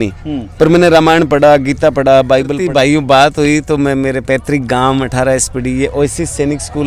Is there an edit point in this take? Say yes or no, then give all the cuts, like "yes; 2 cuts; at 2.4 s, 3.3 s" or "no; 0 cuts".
yes; 1 cut; at 2.6 s